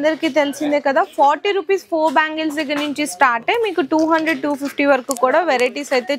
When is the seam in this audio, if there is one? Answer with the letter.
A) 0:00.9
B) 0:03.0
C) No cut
C